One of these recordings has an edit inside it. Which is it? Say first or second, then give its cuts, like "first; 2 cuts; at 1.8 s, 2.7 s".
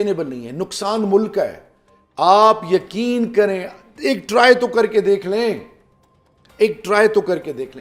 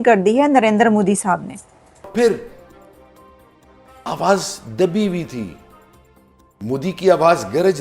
second; 1 cut; at 2.1 s